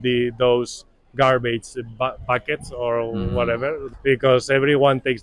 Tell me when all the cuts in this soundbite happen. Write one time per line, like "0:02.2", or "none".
none

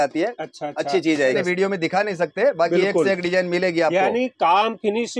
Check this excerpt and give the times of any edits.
0:01.3

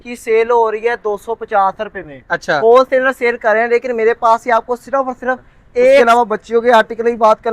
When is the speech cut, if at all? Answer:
0:06.0

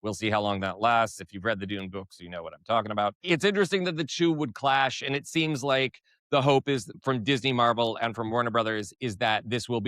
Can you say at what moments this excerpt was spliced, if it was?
0:06.9

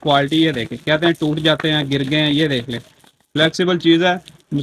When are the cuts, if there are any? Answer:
none

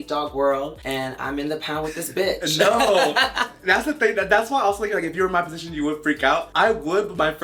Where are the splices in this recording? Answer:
none

